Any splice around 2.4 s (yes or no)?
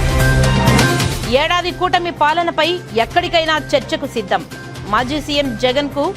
no